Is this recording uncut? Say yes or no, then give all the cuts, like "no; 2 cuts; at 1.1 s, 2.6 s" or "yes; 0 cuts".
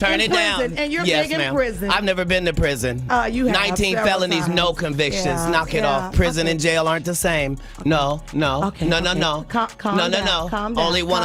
yes; 0 cuts